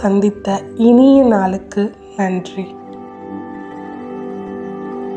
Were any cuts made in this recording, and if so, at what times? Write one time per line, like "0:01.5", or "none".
none